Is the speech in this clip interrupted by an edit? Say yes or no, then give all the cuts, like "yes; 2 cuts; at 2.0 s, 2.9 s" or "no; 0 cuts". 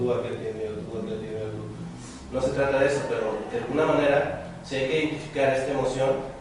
yes; 1 cut; at 2.7 s